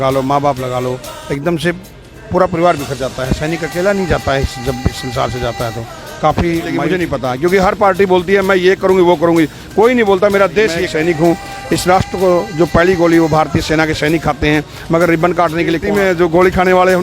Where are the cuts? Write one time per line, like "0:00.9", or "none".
0:06.9
0:10.9
0:15.8

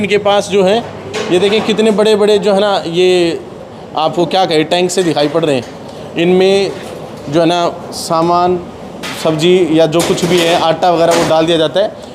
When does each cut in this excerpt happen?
none

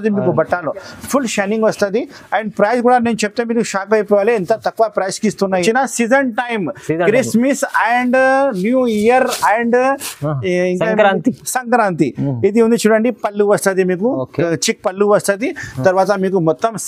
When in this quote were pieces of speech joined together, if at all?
0:05.6

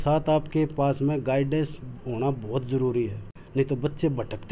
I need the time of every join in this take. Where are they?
none

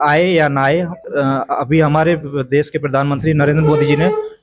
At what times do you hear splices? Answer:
0:01.0

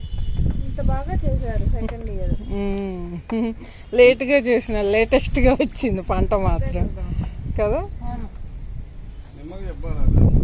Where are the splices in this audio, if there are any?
none

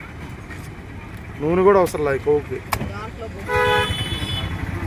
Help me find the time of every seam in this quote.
0:03.4

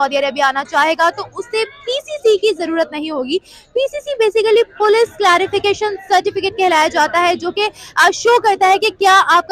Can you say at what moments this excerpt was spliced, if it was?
none

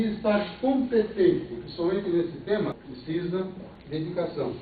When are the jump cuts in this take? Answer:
0:02.9
0:03.7

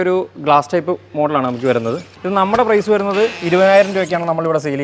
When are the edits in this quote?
0:02.1

